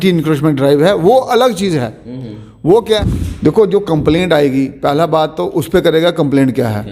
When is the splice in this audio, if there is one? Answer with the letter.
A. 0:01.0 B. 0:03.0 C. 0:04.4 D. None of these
B